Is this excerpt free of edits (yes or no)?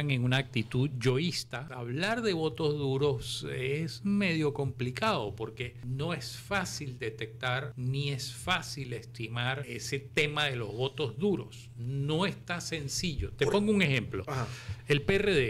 no